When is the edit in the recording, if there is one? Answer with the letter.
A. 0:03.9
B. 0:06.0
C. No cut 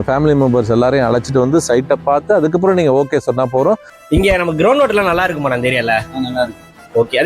A